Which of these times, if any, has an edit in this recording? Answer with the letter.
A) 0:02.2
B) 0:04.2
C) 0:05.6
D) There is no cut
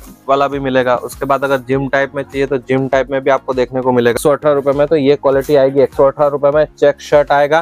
B